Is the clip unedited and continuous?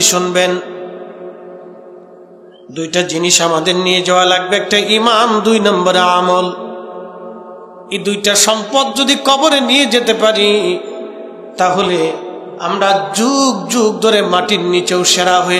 yes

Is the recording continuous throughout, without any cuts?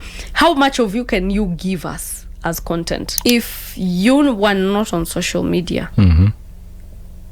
no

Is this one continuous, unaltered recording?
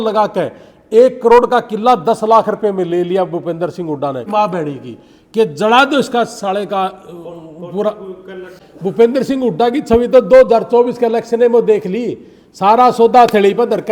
no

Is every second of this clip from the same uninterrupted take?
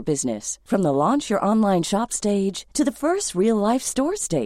yes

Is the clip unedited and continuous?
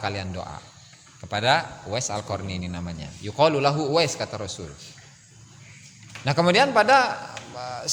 yes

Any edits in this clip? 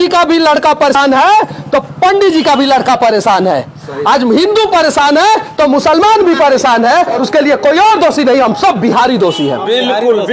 yes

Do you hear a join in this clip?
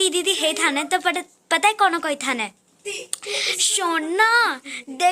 no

